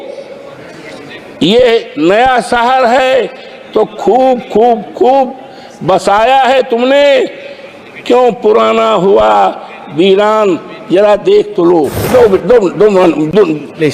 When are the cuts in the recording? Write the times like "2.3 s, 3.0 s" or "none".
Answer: 12.1 s